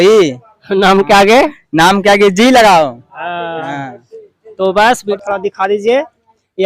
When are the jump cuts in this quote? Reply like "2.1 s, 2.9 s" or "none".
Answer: 5.1 s